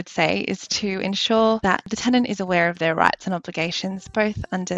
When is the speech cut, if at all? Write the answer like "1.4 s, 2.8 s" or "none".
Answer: 1.9 s